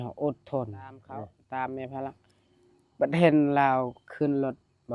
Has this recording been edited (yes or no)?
yes